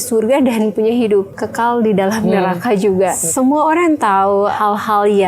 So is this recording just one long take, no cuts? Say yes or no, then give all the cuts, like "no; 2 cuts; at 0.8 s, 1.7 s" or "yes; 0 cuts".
no; 3 cuts; at 1.4 s, 3.2 s, 4.5 s